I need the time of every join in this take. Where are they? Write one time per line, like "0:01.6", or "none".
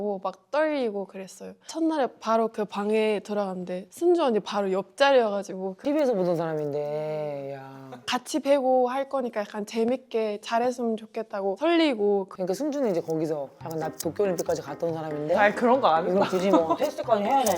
0:05.7
0:12.3